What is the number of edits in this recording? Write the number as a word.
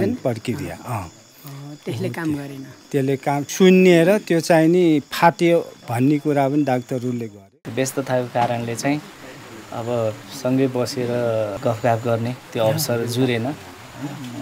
three